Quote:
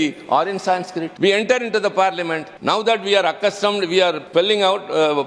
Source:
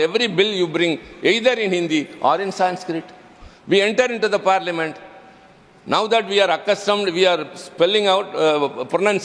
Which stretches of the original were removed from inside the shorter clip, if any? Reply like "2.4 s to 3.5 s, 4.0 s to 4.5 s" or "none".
3.0 s to 3.5 s, 5.0 s to 5.7 s, 7.5 s to 7.7 s